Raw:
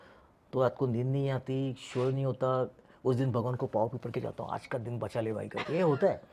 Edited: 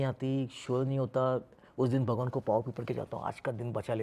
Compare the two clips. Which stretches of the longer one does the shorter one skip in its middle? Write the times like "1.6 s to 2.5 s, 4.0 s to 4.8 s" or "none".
none